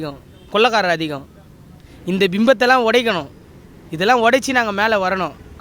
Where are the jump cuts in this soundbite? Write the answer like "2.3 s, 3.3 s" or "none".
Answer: none